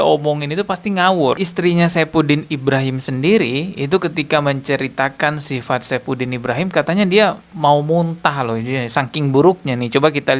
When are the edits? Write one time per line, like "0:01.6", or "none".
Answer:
0:01.4

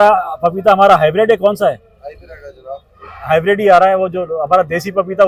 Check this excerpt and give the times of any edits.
none

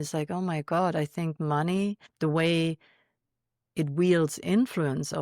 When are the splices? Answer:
0:02.1

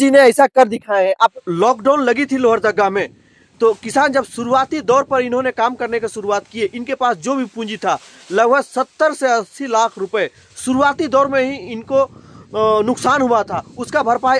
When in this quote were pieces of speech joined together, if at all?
0:01.3

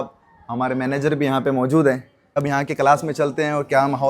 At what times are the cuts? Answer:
0:02.0

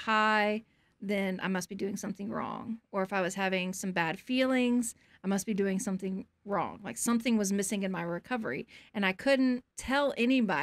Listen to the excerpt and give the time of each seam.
0:09.7

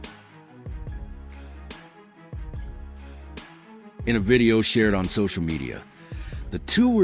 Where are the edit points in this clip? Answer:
0:04.0

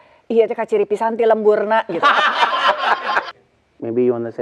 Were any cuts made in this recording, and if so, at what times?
0:03.3

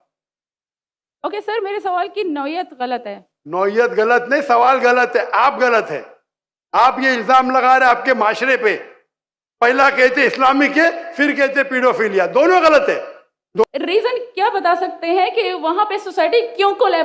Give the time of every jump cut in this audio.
0:13.6

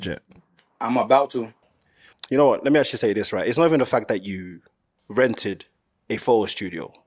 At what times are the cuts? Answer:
0:01.5

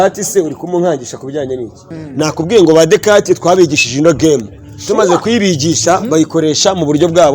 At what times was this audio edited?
0:02.0

